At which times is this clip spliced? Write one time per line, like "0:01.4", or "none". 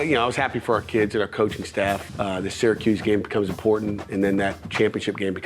0:02.0